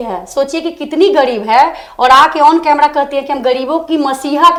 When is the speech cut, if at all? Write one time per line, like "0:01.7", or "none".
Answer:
none